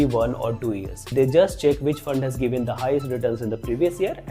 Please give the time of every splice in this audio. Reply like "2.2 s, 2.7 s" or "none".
1.1 s